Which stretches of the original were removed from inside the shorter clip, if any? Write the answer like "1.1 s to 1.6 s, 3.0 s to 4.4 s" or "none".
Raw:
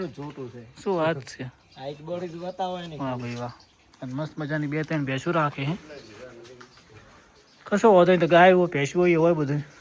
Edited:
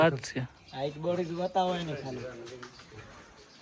2.9 s to 5.9 s